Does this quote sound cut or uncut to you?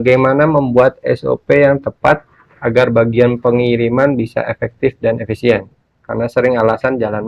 uncut